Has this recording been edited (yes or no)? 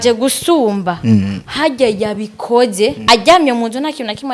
yes